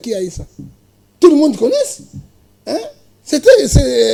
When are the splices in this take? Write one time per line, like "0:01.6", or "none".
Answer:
none